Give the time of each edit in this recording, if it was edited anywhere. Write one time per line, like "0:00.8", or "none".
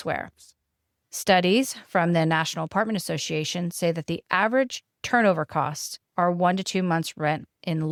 none

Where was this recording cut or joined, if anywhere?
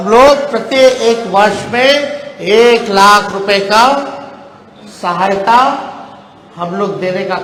none

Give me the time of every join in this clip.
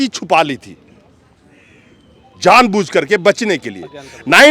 none

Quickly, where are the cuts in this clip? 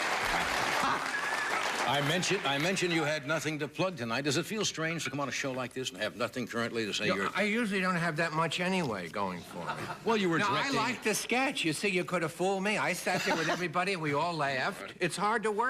0:09.4

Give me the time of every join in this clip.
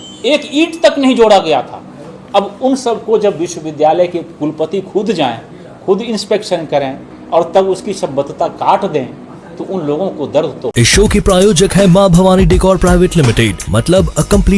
none

